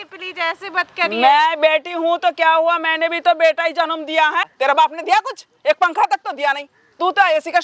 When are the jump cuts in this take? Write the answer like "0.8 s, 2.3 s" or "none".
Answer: 4.4 s